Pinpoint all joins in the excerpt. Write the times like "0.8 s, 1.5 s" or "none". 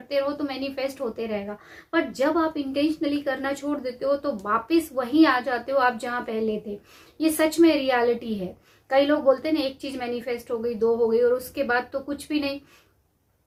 none